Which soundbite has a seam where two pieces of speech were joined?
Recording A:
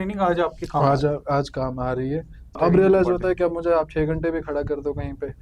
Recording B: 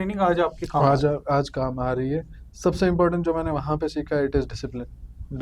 A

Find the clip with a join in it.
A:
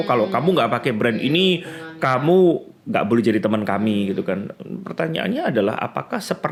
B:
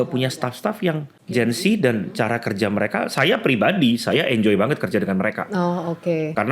B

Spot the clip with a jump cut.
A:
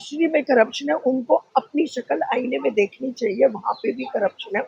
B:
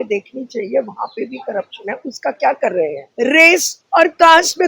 B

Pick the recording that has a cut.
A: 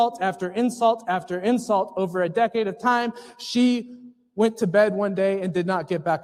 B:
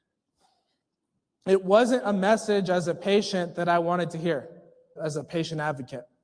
B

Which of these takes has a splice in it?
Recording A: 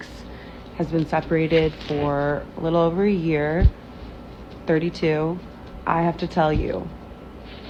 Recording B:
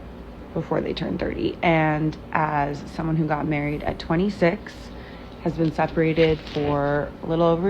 B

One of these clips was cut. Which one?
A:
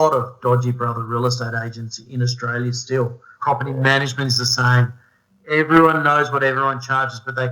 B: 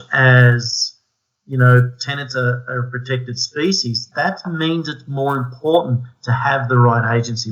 A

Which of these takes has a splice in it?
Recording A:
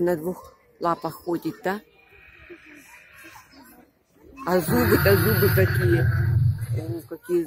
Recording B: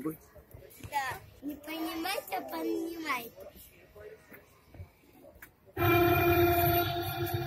B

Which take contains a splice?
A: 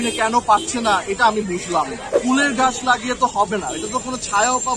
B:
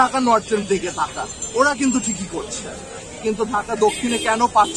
A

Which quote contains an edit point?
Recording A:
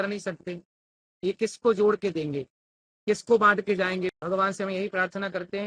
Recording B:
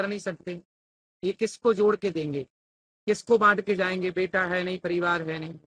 A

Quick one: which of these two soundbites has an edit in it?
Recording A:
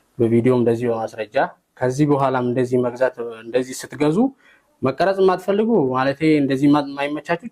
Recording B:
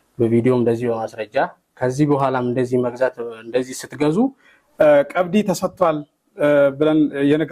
B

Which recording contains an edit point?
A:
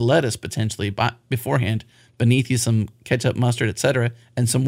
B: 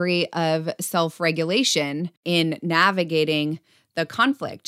B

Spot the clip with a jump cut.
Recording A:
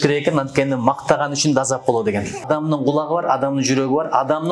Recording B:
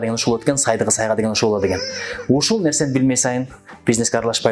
A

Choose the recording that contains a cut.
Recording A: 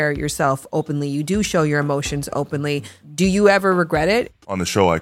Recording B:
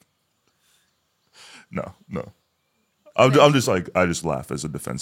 A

